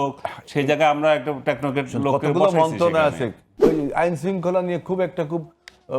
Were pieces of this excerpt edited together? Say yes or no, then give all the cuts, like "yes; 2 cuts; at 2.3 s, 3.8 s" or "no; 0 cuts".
yes; 1 cut; at 3.6 s